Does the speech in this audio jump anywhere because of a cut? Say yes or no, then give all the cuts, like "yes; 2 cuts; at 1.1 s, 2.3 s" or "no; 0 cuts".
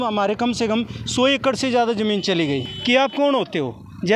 yes; 1 cut; at 2.7 s